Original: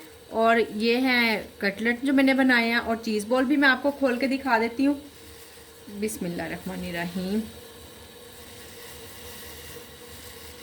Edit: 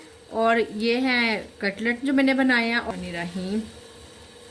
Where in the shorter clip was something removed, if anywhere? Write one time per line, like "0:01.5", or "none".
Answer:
0:02.9